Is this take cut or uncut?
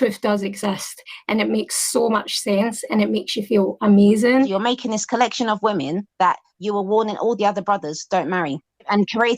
cut